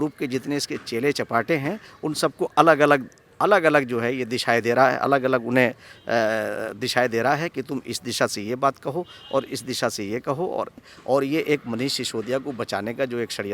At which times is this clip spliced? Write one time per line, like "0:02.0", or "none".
0:10.8